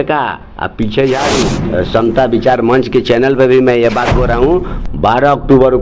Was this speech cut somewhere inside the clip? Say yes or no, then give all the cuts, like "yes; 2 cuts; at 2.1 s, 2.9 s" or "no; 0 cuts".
yes; 1 cut; at 1.6 s